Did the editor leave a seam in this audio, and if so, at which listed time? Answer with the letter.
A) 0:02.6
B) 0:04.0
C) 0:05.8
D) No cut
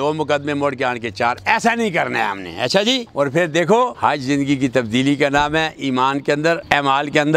D